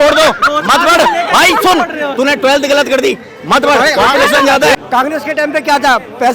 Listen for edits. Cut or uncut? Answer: cut